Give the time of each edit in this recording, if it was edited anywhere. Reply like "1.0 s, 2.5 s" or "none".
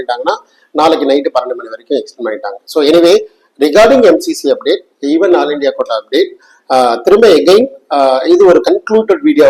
none